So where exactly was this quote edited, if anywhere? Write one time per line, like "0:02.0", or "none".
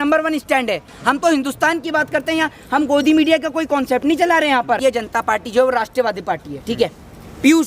0:04.8

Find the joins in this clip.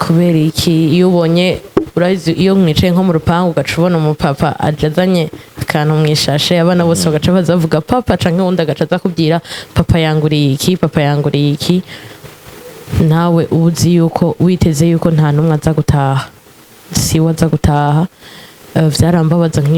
none

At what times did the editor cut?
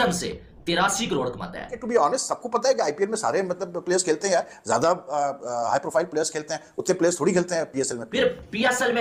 0:01.8
0:08.0

